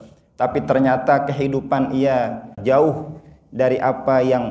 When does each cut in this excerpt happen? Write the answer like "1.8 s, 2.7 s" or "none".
2.5 s

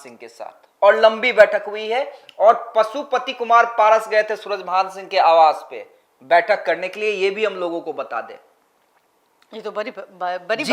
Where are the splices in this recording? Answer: none

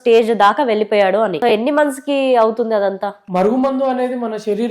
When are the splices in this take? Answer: 1.4 s, 3.2 s

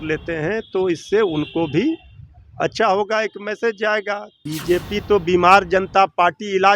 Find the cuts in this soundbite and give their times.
4.5 s

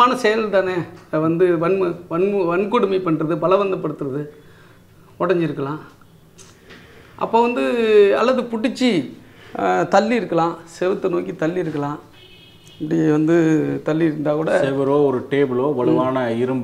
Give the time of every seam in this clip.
none

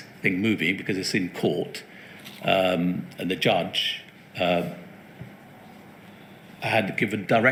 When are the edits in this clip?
none

